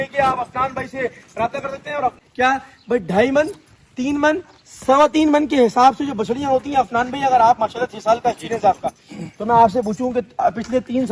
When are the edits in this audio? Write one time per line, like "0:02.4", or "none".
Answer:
0:02.2